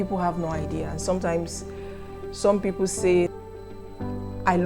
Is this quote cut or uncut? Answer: cut